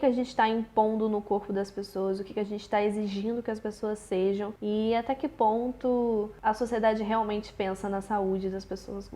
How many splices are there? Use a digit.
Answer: 2